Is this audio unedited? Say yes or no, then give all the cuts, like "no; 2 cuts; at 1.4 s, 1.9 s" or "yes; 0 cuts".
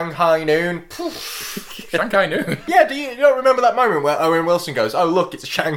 no; 1 cut; at 2.6 s